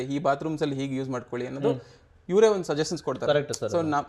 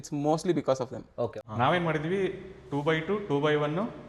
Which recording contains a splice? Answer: second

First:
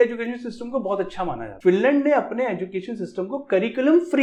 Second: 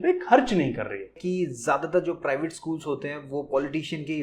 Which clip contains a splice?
second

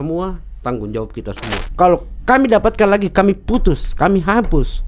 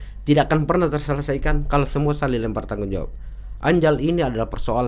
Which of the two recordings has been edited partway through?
first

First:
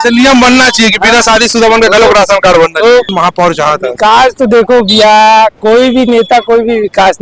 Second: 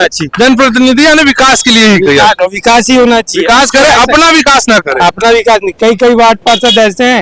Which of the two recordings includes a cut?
first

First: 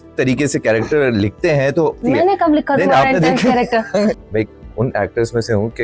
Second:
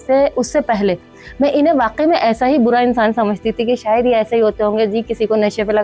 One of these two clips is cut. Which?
first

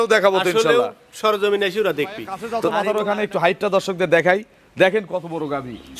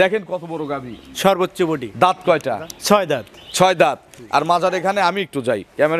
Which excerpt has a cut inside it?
first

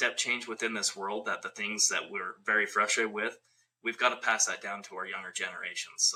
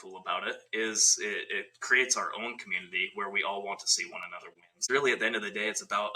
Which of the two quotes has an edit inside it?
second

